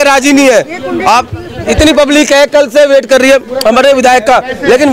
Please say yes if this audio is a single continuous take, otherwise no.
yes